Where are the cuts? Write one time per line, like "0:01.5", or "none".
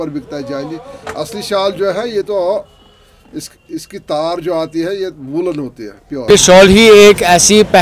0:06.2